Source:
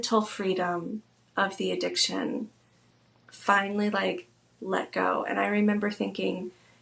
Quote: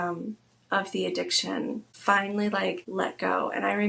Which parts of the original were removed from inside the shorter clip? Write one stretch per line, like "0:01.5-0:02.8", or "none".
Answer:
0:02.6-0:03.3
0:04.2-0:04.6